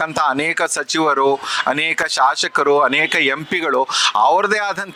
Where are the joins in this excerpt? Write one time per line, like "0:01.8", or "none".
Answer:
none